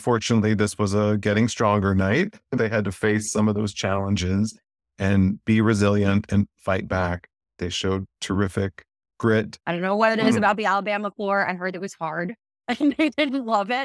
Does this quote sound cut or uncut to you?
cut